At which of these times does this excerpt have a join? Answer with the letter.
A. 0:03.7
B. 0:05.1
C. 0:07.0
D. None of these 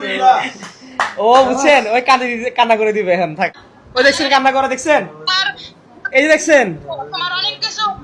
A